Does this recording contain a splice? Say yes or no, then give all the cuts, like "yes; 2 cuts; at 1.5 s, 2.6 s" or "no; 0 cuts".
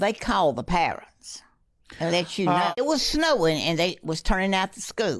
yes; 1 cut; at 2.7 s